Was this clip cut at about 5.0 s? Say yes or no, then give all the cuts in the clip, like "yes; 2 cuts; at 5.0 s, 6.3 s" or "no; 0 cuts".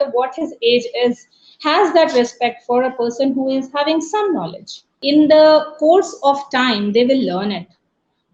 yes; 1 cut; at 5.0 s